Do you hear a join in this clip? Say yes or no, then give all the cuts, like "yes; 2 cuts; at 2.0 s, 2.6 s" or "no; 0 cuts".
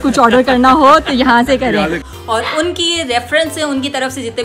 yes; 1 cut; at 2.1 s